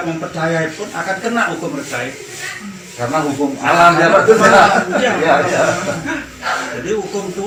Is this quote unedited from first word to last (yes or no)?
yes